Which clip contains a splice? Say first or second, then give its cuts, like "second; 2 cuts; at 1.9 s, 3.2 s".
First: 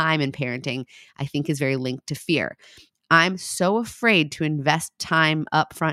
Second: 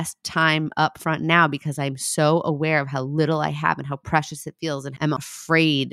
second; 1 cut; at 5.0 s